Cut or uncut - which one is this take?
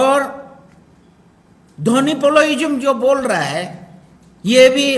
uncut